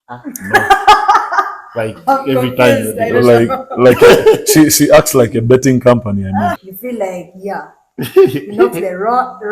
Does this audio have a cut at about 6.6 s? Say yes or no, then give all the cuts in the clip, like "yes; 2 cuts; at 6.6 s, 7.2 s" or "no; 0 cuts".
yes; 1 cut; at 6.6 s